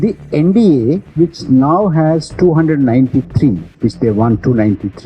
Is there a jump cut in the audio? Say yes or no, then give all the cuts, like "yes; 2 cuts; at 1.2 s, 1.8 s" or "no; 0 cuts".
yes; 1 cut; at 1.1 s